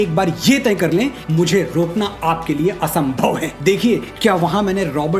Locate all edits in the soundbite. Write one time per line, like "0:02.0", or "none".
0:01.2
0:03.5